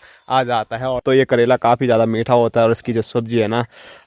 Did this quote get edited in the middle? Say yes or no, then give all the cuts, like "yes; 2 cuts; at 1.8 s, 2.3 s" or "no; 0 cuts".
yes; 1 cut; at 1.0 s